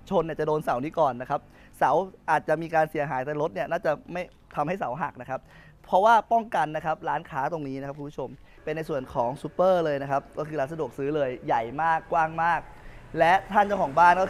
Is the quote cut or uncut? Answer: cut